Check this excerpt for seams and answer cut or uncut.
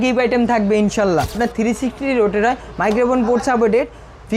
cut